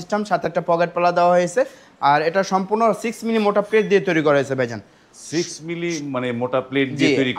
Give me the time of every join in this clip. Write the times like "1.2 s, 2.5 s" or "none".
none